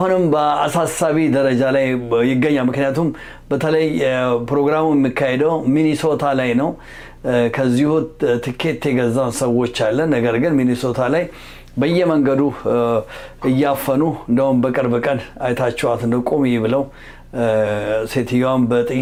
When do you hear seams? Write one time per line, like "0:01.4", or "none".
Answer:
none